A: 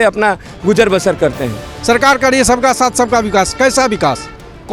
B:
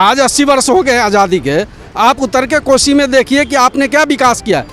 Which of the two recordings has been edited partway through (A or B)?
A